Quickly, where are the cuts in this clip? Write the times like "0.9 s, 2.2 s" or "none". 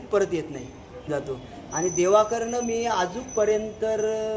1.1 s